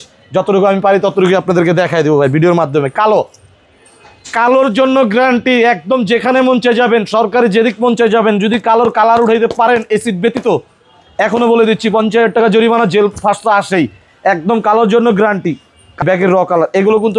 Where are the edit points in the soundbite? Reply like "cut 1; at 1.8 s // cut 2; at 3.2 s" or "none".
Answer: cut 1; at 16.0 s